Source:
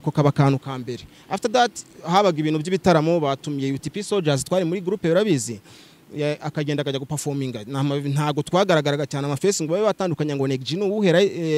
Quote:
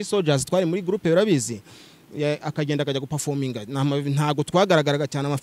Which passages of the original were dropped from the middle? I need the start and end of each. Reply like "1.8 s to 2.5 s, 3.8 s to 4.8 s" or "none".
none